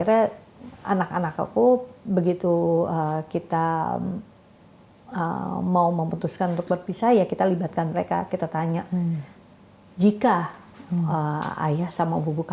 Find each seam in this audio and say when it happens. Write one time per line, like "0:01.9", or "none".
none